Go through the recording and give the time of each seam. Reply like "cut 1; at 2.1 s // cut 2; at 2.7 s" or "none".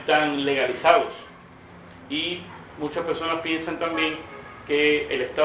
cut 1; at 2.1 s